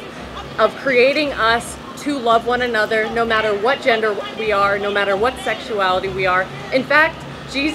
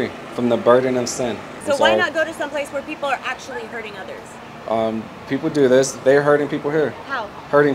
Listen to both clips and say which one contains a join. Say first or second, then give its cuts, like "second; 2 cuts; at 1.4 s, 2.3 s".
second; 1 cut; at 1.5 s